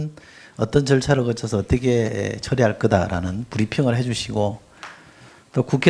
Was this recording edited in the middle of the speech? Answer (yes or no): no